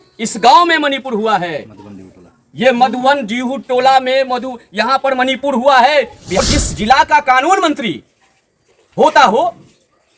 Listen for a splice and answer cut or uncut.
cut